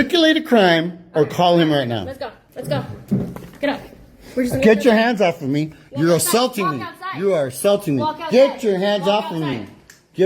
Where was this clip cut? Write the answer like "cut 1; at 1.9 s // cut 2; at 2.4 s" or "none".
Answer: cut 1; at 2.4 s